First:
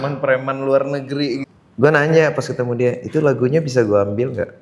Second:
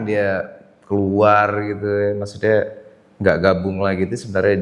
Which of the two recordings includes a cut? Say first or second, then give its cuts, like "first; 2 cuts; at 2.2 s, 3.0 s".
first; 1 cut; at 1.5 s